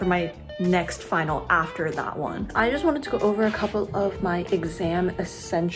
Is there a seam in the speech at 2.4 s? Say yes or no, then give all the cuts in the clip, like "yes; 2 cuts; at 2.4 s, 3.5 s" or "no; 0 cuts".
yes; 1 cut; at 2.4 s